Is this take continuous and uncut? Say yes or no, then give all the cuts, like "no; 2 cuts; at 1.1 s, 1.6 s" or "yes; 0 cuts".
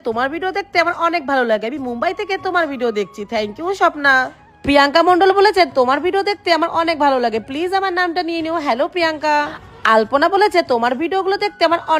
yes; 0 cuts